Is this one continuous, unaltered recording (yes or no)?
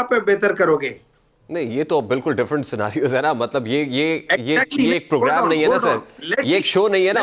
yes